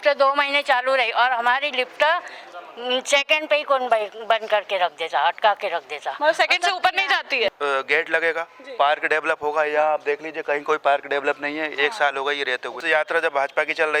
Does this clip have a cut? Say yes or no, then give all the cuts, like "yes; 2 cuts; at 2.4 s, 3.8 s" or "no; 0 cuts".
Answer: yes; 2 cuts; at 7.5 s, 12.7 s